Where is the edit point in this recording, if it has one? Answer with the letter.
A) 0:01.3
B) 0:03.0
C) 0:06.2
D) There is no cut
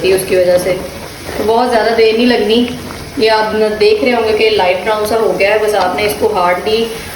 D